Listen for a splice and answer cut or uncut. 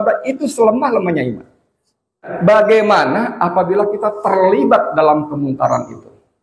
cut